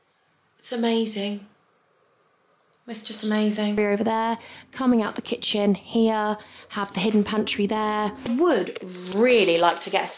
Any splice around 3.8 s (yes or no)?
yes